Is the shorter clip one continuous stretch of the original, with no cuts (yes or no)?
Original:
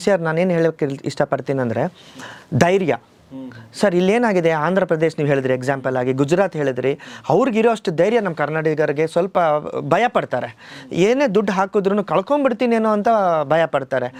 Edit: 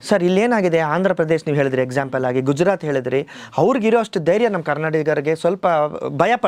yes